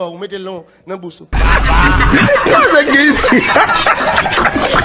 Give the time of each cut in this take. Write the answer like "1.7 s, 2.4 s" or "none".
1.2 s